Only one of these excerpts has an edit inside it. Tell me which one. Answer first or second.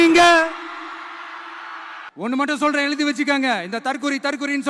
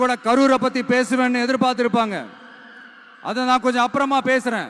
first